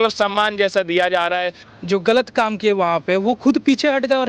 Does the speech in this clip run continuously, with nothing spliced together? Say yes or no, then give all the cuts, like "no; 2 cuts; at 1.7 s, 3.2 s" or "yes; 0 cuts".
no; 1 cut; at 1.6 s